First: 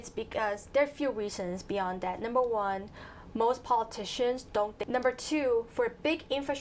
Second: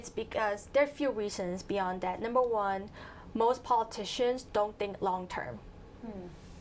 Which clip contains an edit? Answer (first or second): first